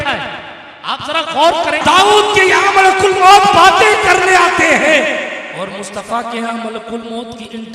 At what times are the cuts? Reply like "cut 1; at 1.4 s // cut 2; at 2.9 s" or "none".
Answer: cut 1; at 1.8 s